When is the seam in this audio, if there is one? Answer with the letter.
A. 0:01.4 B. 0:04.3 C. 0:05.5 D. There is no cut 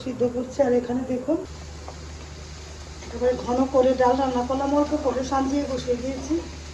A